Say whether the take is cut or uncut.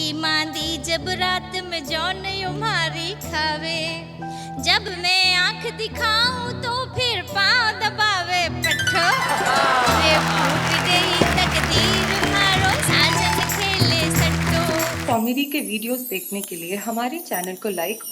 cut